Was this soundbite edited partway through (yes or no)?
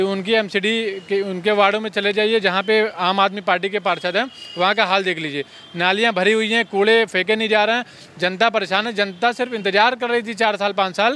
no